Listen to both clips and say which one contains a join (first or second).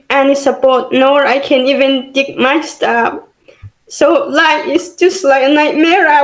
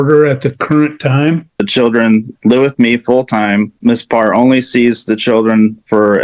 second